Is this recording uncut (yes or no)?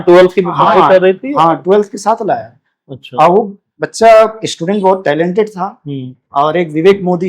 yes